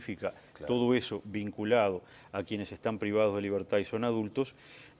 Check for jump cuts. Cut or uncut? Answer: cut